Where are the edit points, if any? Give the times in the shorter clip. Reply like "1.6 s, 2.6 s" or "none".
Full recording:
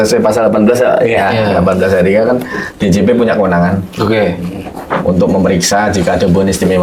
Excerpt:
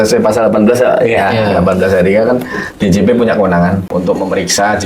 3.9 s